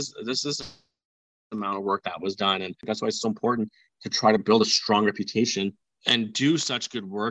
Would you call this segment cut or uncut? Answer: cut